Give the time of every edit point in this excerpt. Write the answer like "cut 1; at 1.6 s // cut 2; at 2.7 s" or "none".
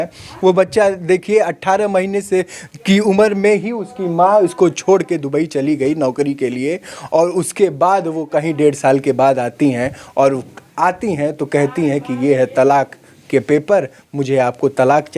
none